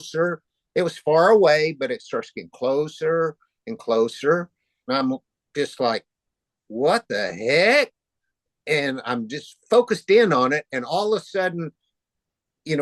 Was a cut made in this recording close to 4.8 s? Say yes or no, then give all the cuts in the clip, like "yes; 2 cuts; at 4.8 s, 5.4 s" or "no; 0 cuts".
yes; 1 cut; at 4.8 s